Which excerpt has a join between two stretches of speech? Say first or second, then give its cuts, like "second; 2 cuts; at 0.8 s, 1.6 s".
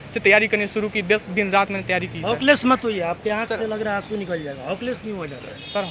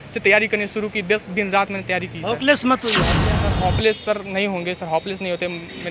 second; 1 cut; at 3.3 s